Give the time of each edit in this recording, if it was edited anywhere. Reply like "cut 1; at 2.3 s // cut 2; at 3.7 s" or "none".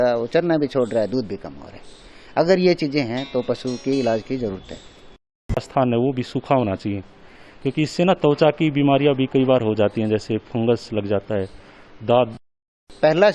cut 1; at 5.7 s // cut 2; at 12.5 s

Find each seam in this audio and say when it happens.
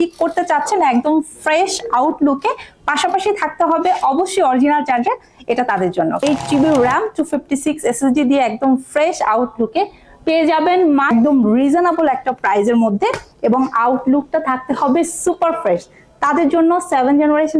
cut 1; at 6.2 s // cut 2; at 11.1 s

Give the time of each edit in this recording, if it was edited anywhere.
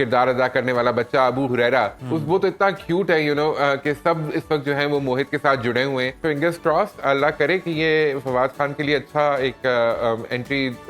cut 1; at 2.0 s // cut 2; at 6.2 s

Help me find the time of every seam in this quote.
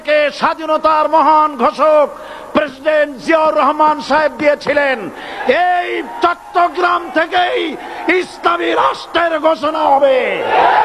none

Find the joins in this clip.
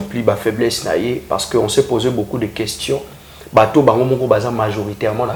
none

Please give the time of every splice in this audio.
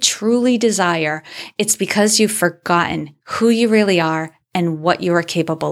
none

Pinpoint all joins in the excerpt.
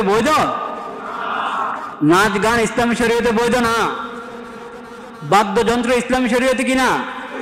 none

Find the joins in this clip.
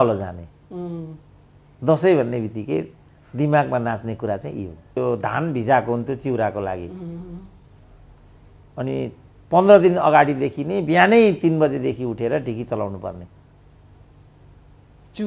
cut 1; at 5.0 s

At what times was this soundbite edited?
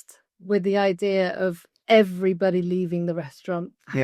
cut 1; at 1.7 s

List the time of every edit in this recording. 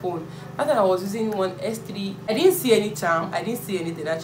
cut 1; at 2.2 s

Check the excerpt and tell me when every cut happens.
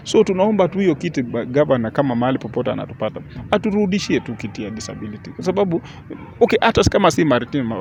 none

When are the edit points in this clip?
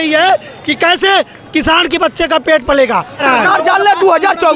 cut 1; at 3.2 s

